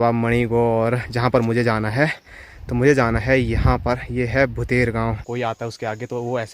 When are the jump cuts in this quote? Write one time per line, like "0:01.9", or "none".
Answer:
0:05.2